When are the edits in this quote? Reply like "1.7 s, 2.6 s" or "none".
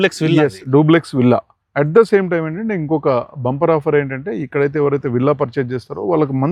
none